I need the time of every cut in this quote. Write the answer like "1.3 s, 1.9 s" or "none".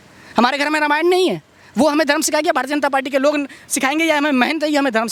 none